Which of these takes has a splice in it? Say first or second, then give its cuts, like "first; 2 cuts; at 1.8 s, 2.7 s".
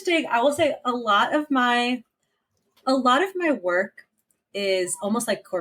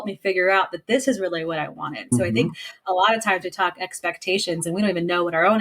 second; 1 cut; at 2.1 s